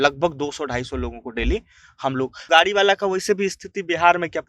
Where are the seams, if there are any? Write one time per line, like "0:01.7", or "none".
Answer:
0:02.4